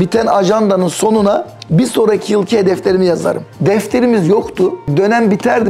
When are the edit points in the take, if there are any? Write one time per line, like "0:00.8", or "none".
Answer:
0:03.5
0:04.9